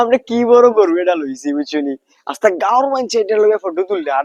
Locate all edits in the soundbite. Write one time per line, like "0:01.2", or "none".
none